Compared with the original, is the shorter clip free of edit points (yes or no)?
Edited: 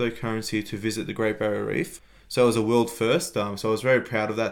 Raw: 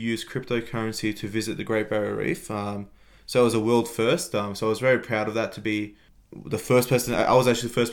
no